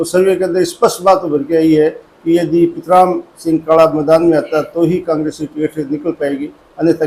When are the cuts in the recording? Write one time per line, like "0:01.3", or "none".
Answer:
none